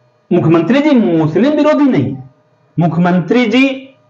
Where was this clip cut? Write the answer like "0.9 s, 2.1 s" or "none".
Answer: none